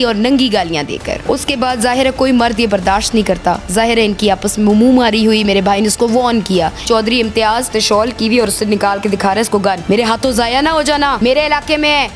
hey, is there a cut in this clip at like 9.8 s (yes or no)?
yes